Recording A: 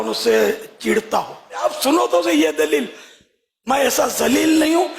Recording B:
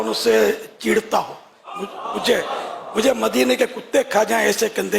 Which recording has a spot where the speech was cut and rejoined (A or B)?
A